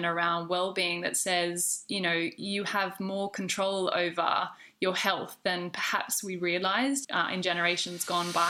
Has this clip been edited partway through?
yes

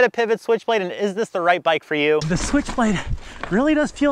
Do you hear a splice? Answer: yes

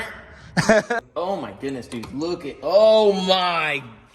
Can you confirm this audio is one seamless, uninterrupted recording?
no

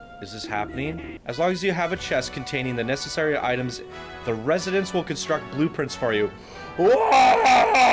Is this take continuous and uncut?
no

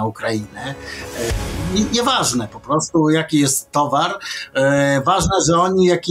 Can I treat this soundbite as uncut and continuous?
no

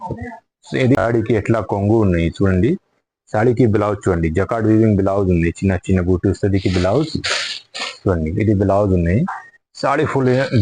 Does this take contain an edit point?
yes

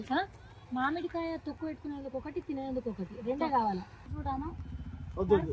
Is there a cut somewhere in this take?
yes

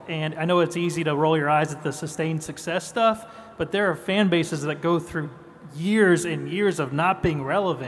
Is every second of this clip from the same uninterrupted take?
yes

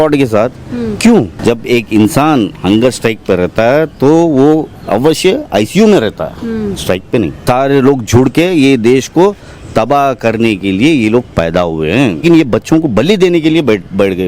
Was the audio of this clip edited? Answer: yes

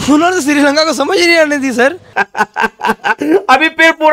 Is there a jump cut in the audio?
yes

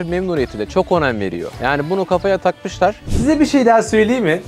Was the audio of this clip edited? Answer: yes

